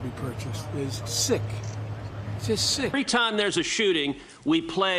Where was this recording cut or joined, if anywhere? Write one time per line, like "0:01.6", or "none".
none